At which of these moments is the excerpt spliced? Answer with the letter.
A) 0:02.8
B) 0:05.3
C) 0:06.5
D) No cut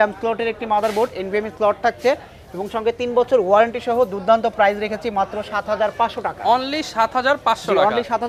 D